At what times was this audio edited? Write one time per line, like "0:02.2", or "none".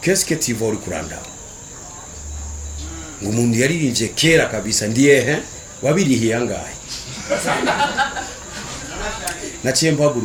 none